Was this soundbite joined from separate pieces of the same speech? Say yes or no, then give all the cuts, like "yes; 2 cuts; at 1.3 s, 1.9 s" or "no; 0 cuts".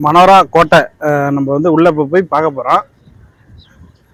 no; 0 cuts